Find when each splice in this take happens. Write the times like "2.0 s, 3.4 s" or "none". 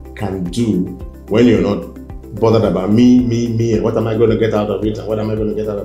none

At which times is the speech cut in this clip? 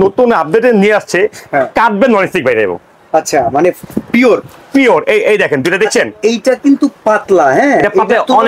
none

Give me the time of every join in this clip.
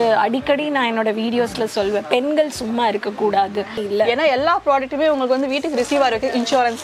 3.8 s

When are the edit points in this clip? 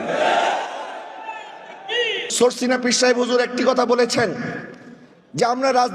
2.2 s

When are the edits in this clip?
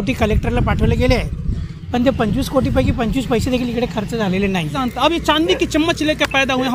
4.8 s

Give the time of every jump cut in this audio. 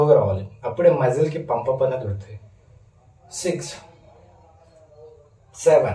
none

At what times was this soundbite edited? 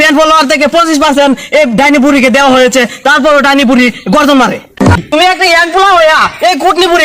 4.9 s

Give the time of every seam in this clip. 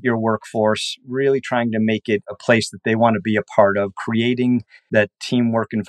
4.9 s

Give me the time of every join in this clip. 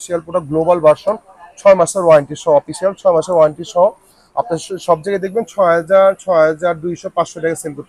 none

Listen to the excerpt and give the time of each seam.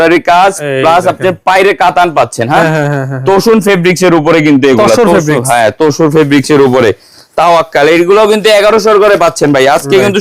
none

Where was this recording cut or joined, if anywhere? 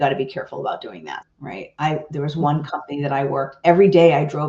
1.2 s

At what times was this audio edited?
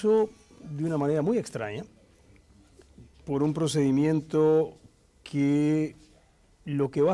3.6 s

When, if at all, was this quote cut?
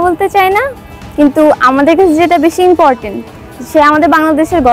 none

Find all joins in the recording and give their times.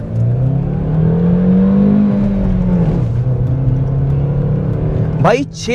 none

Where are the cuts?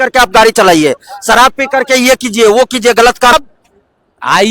3.3 s

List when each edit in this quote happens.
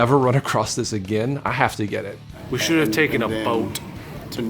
1.4 s, 2.3 s

